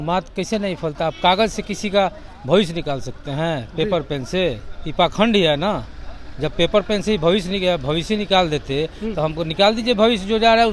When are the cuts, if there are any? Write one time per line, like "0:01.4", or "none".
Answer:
none